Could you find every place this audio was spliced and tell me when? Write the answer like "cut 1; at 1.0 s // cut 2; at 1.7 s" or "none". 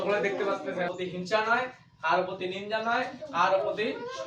cut 1; at 0.9 s